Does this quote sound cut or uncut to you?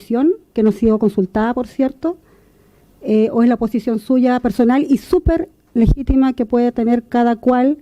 uncut